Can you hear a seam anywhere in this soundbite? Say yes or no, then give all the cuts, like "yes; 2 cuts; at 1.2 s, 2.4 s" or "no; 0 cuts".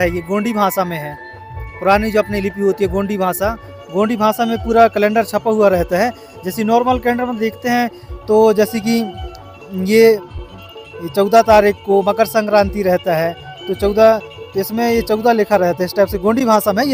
no; 0 cuts